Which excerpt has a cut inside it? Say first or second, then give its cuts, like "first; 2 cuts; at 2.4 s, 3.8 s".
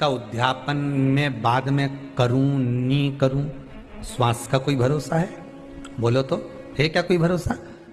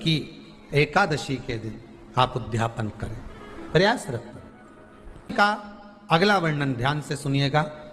second; 1 cut; at 5.3 s